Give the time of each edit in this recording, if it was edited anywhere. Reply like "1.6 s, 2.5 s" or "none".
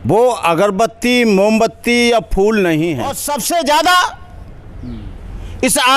3.2 s